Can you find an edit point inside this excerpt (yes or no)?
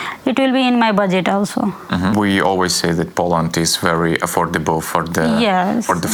no